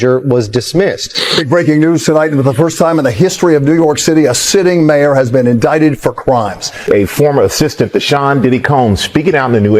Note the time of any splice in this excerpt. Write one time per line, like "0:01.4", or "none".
0:01.3
0:06.7